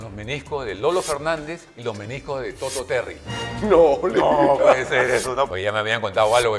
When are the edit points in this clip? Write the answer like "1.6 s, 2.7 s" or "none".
5.5 s